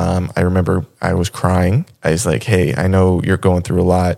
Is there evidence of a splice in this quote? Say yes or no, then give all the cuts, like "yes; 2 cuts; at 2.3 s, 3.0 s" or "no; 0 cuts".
yes; 1 cut; at 1.9 s